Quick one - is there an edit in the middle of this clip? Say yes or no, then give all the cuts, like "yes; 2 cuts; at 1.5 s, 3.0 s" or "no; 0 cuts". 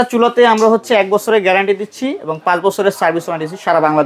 no; 0 cuts